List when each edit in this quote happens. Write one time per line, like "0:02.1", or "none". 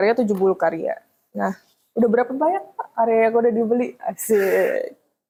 none